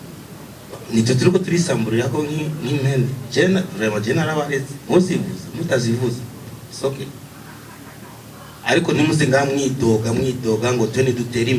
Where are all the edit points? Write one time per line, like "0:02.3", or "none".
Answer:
none